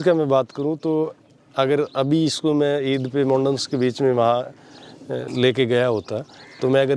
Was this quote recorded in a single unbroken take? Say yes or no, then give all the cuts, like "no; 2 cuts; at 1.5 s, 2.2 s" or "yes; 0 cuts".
yes; 0 cuts